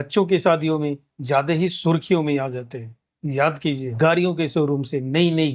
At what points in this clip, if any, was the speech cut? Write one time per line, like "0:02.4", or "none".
0:03.9